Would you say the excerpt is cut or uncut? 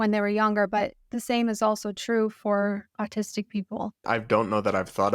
cut